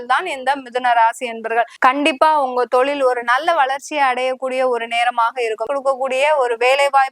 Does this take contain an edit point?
yes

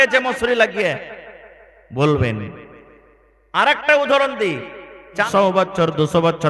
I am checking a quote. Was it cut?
yes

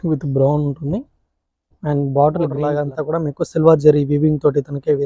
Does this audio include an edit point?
yes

